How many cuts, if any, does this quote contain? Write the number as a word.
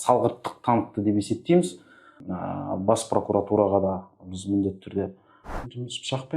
two